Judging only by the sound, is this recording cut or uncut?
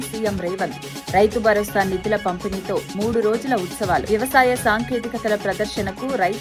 uncut